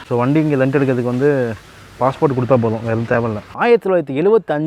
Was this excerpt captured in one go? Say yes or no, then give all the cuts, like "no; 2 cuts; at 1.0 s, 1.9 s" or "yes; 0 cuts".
no; 1 cut; at 3.5 s